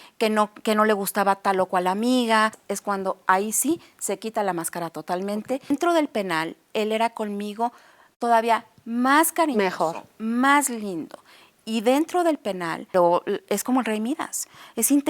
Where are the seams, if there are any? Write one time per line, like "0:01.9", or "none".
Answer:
0:02.7
0:05.7
0:12.9